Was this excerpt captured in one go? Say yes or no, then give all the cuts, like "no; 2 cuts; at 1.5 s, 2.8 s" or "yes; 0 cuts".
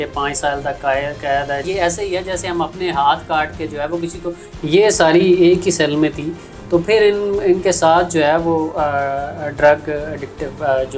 no; 2 cuts; at 1.6 s, 4.4 s